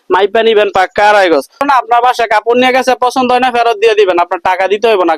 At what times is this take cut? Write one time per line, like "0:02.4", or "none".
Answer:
0:01.6

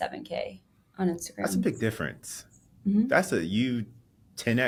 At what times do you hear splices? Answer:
none

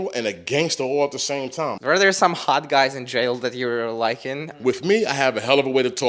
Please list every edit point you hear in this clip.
0:01.8
0:04.5

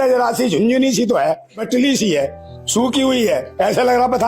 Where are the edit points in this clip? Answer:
0:01.6
0:03.5

